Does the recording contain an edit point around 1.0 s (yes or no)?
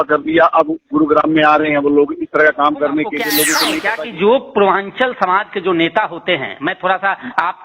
no